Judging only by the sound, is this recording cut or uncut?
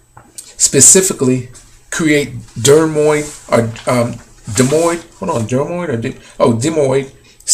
uncut